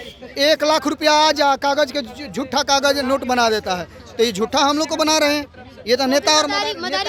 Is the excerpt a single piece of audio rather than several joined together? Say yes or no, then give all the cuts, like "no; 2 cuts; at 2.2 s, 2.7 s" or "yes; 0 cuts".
yes; 0 cuts